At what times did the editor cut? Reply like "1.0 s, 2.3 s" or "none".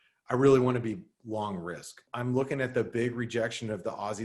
2.1 s